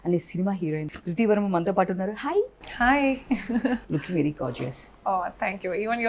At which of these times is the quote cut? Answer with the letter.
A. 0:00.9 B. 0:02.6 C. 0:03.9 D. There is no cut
A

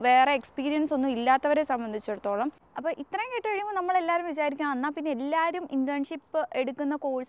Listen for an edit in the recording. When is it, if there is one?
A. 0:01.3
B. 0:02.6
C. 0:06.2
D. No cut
B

